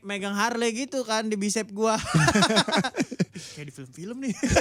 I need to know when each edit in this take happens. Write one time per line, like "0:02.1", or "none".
none